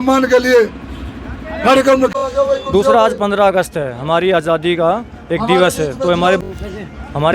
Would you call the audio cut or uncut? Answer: cut